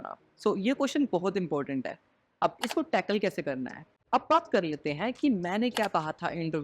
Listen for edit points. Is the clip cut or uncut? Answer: cut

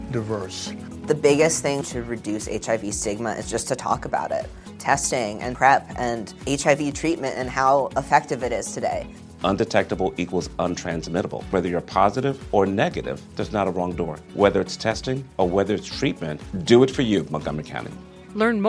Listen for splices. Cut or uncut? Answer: uncut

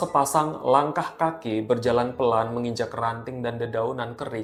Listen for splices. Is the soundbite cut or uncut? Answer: uncut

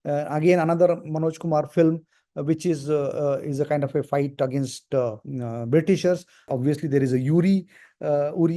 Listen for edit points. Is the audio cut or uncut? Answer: cut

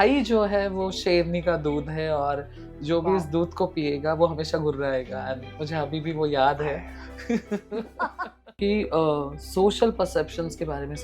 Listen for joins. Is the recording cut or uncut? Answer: cut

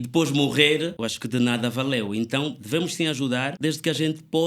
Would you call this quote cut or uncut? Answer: cut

